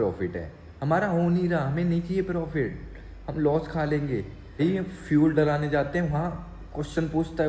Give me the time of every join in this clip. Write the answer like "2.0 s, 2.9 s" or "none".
4.6 s